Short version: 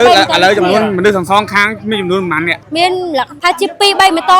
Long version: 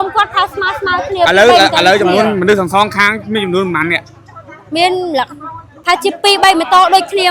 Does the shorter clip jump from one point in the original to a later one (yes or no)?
yes